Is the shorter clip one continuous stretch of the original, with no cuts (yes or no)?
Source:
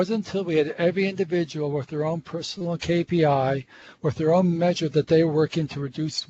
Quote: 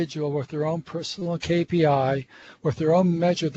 yes